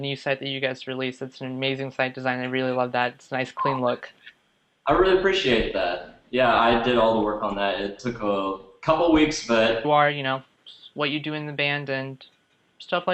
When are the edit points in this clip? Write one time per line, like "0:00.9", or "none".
none